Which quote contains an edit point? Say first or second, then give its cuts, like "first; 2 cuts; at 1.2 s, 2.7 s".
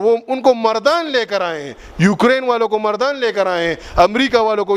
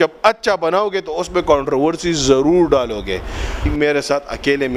second; 1 cut; at 3.7 s